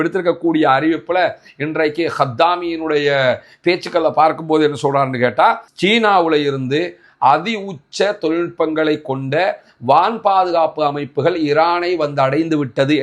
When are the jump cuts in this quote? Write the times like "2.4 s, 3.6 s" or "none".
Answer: 5.7 s